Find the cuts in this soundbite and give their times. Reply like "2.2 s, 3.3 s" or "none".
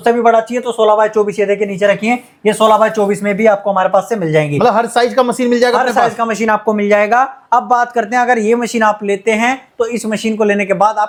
none